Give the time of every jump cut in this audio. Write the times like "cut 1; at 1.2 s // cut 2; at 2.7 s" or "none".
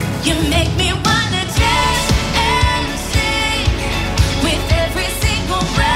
none